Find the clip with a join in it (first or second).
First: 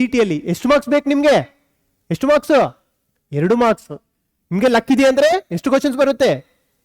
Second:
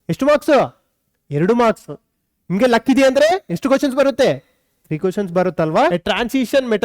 second